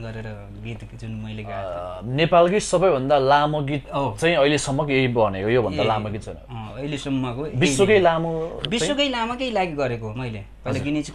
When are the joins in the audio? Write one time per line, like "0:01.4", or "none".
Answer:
0:01.6

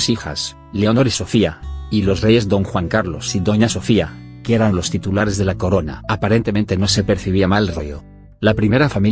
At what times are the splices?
0:01.6

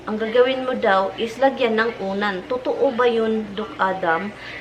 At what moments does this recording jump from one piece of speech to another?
none

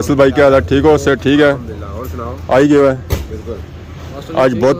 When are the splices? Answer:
none

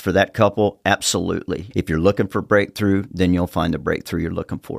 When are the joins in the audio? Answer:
0:01.7

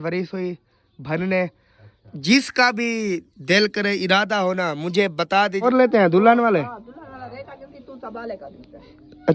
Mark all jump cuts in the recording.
0:05.7

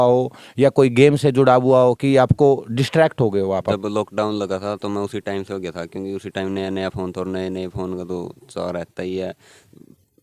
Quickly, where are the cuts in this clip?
0:03.7

